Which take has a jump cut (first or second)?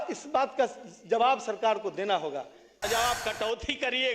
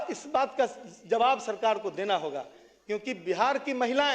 first